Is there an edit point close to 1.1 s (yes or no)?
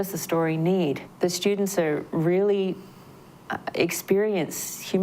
yes